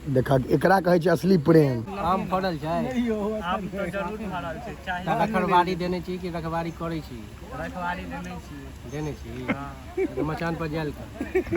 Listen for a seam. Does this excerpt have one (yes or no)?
yes